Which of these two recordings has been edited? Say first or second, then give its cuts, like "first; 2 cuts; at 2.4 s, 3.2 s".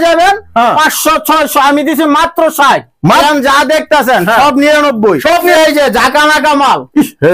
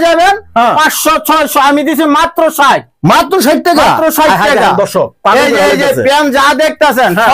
first; 2 cuts; at 3.2 s, 5.5 s